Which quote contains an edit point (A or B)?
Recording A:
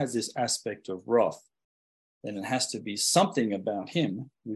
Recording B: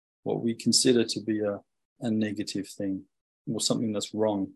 B